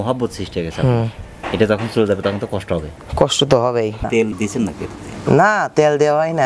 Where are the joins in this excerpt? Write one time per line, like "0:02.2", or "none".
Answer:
0:04.1